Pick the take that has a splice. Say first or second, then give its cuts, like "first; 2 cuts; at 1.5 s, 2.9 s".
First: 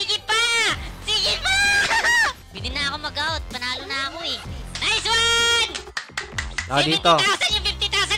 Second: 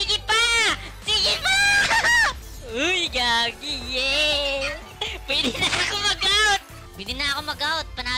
first; 2 cuts; at 2.5 s, 4.6 s